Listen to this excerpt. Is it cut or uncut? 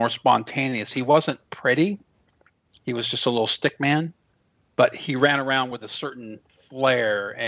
uncut